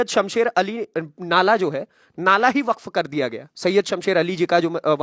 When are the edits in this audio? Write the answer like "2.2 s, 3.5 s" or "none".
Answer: none